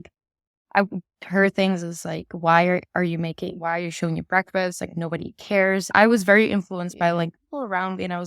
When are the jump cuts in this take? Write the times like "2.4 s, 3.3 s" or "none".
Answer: 5.9 s

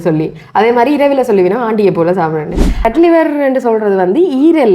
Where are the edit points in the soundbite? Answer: 2.8 s

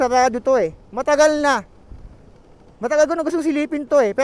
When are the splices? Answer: none

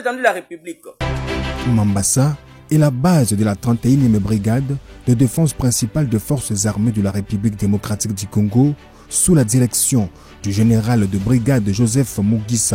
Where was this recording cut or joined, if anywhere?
1.0 s

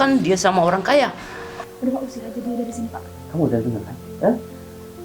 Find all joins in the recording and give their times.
1.5 s

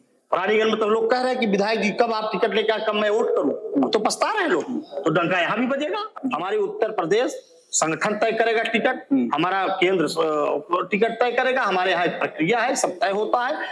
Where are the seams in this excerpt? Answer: 6.1 s

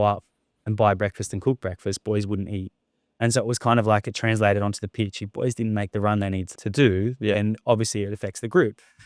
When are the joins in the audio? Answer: 6.5 s

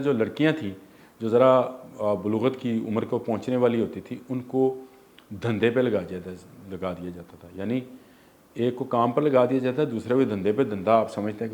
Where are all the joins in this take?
none

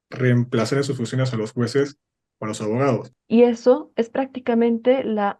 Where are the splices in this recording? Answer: 3.1 s

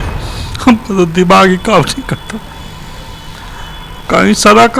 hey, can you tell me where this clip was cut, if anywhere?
none

